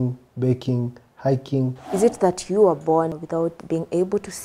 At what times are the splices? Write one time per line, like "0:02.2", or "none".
0:01.8
0:03.4

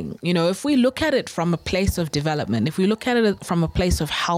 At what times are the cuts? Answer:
none

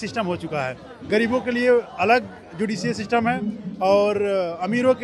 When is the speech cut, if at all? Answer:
none

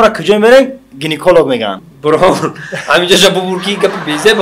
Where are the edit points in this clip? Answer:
0:01.9

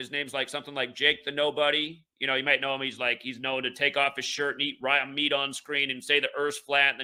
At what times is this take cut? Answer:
none

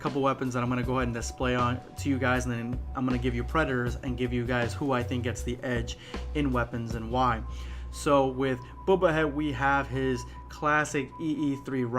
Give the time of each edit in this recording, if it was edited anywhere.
0:09.3

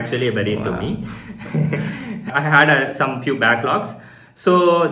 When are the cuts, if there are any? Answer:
0:02.3

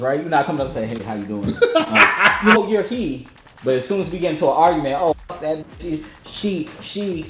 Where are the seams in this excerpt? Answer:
0:02.6

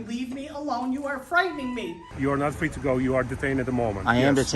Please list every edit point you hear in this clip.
0:02.1

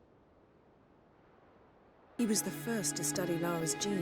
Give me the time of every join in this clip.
0:02.1

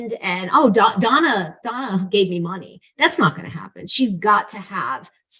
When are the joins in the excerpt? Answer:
none

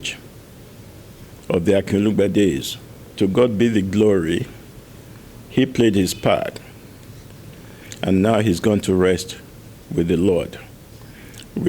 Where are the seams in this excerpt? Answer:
0:03.1

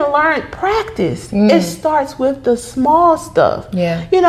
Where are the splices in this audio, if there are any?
none

